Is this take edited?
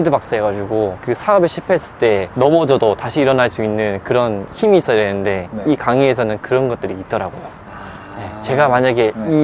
no; 0 cuts

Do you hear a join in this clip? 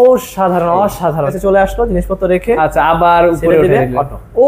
yes; 1 cut; at 1.3 s

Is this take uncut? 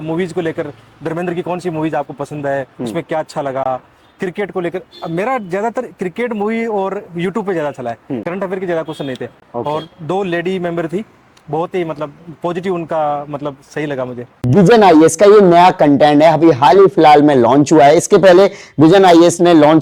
yes; 0 cuts

